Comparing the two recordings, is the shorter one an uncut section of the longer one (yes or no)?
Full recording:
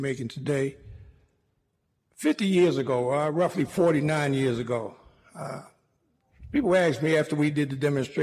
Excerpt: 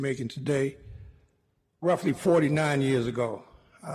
no